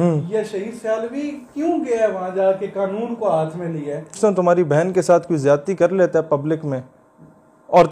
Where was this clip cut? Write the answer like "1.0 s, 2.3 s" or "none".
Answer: 4.1 s